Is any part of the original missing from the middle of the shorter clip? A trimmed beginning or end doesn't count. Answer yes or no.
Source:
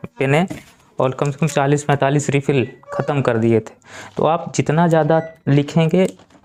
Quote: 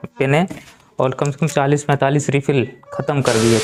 no